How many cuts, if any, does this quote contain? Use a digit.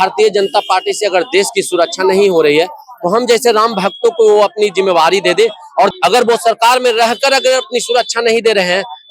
1